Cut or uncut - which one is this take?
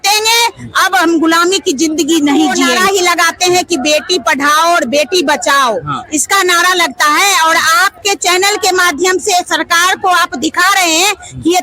cut